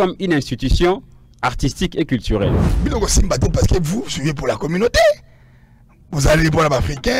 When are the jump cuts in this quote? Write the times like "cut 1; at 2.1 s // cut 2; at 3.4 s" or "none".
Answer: cut 1; at 2.6 s